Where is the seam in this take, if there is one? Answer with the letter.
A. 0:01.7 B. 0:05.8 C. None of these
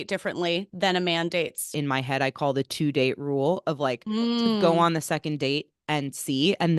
A